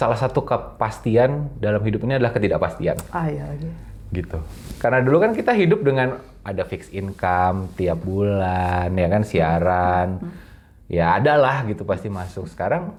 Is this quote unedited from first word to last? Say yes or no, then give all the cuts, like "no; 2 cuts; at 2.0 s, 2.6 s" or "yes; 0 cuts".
yes; 0 cuts